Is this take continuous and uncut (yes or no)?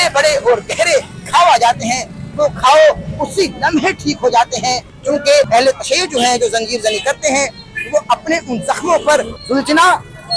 no